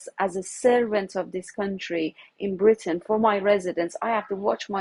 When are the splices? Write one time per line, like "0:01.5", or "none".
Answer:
none